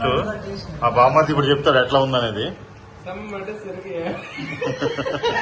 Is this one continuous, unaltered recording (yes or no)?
yes